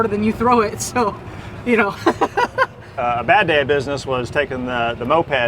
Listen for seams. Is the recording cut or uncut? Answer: cut